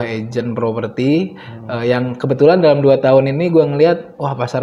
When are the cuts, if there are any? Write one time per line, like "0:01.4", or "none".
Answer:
none

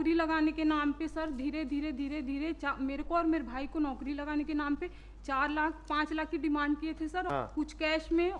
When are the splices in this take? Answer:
0:07.5

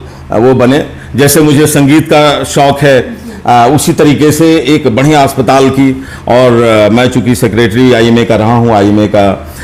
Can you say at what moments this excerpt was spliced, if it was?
none

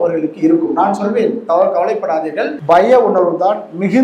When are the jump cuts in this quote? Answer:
0:02.5

